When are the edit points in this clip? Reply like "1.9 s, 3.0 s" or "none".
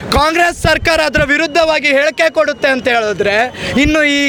none